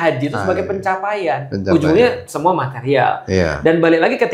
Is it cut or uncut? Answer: uncut